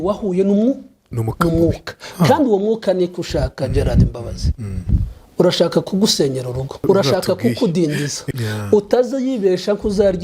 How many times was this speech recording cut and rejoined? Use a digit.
2